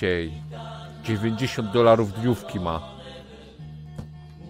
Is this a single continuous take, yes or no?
yes